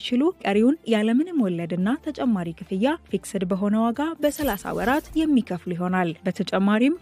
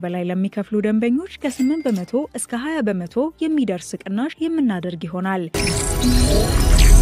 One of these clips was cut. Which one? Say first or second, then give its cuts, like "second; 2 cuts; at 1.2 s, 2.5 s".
second; 1 cut; at 5.5 s